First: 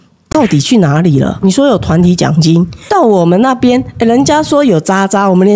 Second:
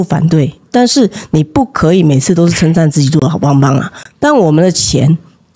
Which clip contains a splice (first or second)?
first